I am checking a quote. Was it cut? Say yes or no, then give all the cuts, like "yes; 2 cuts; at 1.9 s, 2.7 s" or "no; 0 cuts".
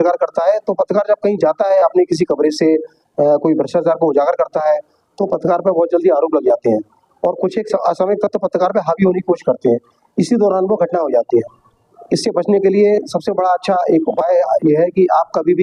no; 0 cuts